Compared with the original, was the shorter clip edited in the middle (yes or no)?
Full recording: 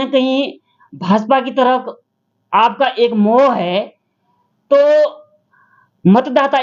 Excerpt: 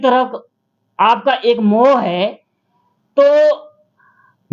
no